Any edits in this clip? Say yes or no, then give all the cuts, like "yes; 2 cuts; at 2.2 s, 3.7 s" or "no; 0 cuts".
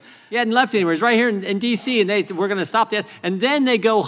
no; 0 cuts